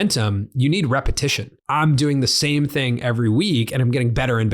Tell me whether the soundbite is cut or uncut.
cut